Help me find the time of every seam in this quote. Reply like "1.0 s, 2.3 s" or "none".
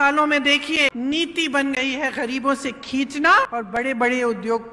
0.9 s, 3.5 s

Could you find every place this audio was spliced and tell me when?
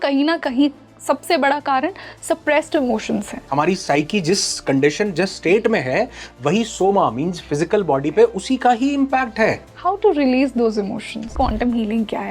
3.4 s, 11.3 s

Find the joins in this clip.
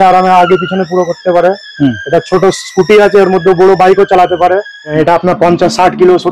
4.9 s

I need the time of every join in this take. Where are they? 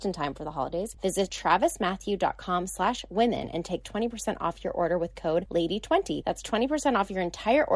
1.2 s, 5.5 s, 6.2 s

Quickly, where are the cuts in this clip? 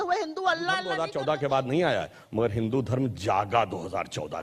1.1 s

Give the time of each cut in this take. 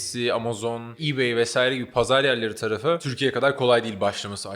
1.0 s, 3.1 s

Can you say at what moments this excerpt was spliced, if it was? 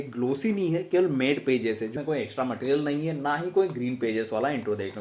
1.9 s

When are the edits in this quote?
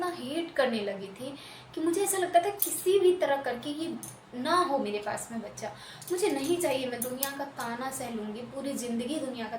none

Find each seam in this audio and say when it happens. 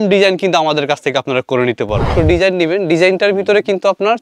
2.1 s

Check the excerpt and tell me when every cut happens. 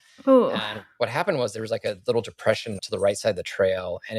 2.8 s

